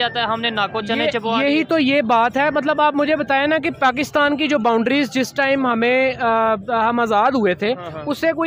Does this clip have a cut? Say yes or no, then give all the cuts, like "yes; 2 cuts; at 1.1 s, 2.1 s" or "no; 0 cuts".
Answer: no; 0 cuts